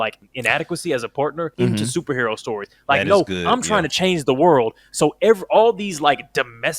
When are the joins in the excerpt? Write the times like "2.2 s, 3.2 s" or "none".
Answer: 1.5 s